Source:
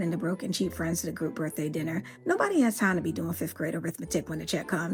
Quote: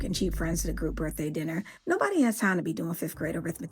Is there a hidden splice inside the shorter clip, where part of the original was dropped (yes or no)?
no